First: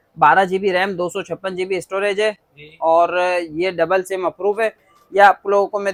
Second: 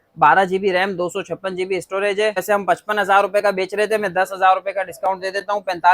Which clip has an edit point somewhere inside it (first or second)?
second